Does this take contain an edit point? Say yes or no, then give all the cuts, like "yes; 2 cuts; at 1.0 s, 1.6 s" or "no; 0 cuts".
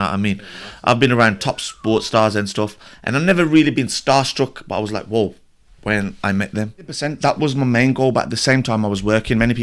yes; 1 cut; at 7.0 s